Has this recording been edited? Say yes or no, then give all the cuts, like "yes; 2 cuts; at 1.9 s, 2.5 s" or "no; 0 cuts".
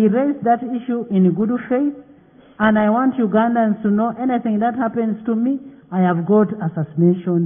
no; 0 cuts